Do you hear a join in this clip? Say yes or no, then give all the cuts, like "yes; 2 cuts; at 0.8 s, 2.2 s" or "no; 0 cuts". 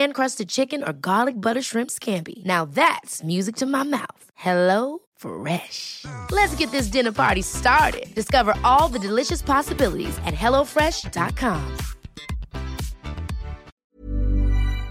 yes; 1 cut; at 13.7 s